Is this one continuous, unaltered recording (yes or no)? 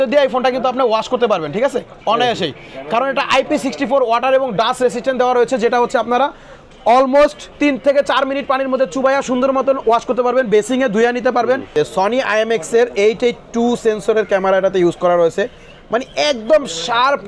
no